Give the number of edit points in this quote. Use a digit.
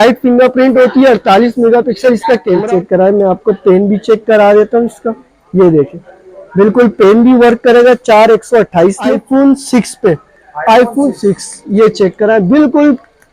2